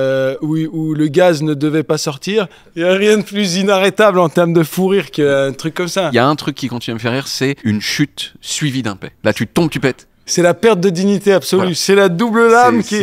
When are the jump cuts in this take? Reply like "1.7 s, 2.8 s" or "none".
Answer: 2.6 s, 6.1 s, 7.6 s, 9.1 s, 10.3 s